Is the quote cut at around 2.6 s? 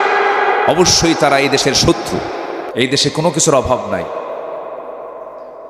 yes; 1 cut; at 2.6 s

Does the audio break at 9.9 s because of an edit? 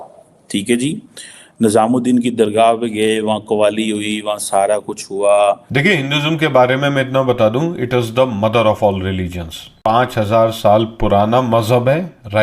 yes; 2 cuts; at 5.7 s, 9.9 s

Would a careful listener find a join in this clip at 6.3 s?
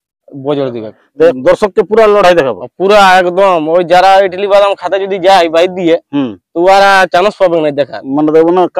no; 1 cut; at 1.3 s

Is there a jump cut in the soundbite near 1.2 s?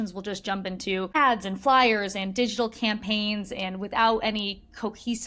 yes; 1 cut; at 1.2 s

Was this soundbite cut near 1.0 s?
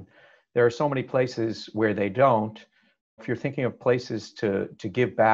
no; 1 cut; at 3.2 s

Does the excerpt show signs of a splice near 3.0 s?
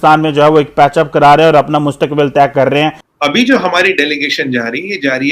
yes; 1 cut; at 3.0 s

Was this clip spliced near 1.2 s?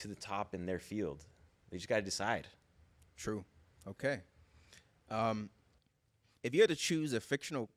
no; 0 cuts

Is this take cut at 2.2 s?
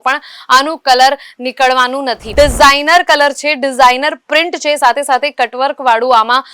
yes; 1 cut; at 2.2 s

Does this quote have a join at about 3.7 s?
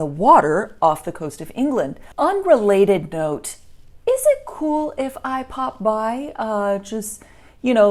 no; 1 cut; at 2.0 s

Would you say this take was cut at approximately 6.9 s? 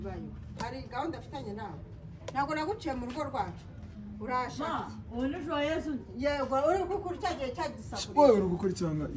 no; 0 cuts

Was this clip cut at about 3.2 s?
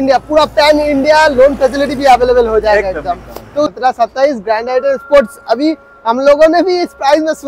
yes; 1 cut; at 3.2 s

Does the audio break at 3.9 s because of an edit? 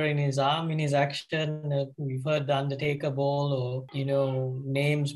yes; 1 cut; at 3.9 s

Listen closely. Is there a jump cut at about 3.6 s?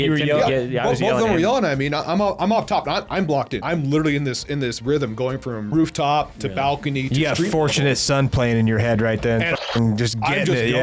yes; 2 cuts; at 3.6 s, 5.7 s

